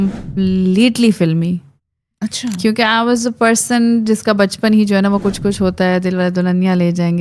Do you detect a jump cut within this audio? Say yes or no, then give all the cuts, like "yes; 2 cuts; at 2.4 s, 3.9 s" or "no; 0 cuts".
no; 0 cuts